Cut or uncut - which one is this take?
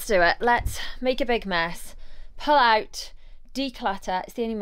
uncut